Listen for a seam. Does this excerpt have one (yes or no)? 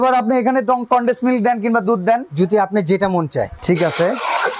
yes